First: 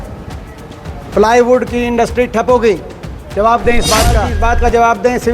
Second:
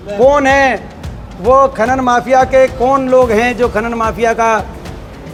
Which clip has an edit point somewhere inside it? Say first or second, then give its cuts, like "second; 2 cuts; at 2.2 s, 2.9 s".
first; 1 cut; at 4.3 s